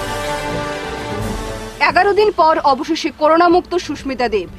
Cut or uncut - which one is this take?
uncut